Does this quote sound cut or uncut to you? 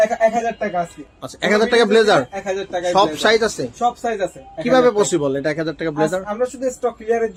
uncut